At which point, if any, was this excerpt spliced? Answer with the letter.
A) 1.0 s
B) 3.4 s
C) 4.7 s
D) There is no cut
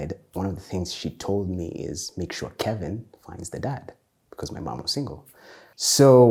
D